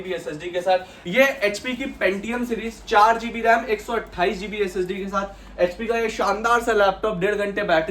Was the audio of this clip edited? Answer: yes; 1 cut; at 1.0 s

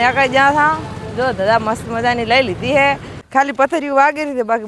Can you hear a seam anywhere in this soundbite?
yes; 1 cut; at 3.1 s

